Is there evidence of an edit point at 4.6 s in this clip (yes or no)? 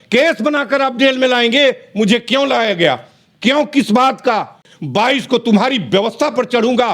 yes